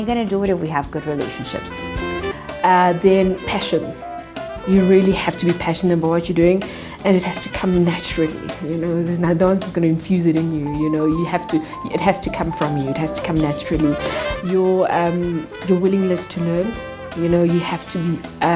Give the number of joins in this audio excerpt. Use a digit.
1